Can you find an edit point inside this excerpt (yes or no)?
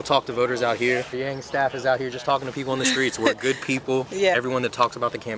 yes